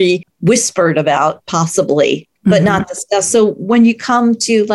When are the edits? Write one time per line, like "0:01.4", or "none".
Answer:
0:02.3